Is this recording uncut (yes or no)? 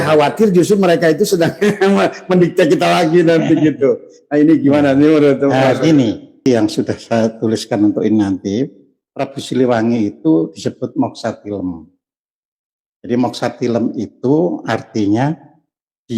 no